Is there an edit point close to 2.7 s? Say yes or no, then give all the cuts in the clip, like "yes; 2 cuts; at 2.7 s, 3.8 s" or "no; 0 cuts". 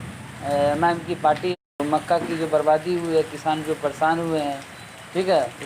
no; 1 cut; at 1.5 s